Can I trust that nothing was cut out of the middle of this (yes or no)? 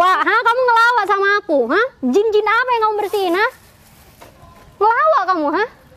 yes